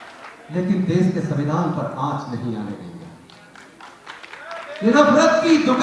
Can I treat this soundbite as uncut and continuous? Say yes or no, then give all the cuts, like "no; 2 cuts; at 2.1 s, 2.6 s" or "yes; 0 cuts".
yes; 0 cuts